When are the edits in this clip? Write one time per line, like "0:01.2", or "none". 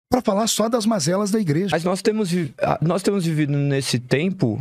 0:02.0